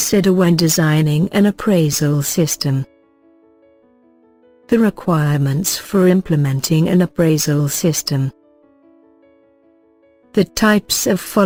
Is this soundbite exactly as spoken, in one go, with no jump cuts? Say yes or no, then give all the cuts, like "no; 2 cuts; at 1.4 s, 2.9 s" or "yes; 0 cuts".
yes; 0 cuts